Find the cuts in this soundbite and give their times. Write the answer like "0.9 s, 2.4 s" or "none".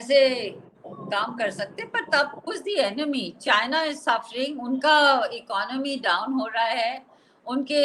2.4 s